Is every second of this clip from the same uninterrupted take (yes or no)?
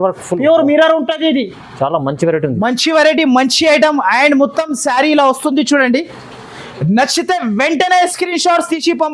yes